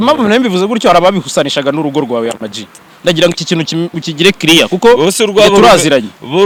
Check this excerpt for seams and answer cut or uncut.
uncut